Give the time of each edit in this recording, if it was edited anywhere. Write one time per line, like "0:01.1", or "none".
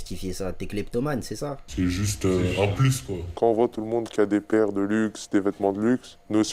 0:01.6